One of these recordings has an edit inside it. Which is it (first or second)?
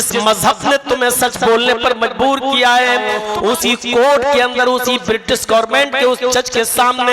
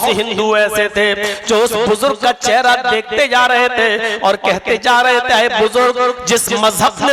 first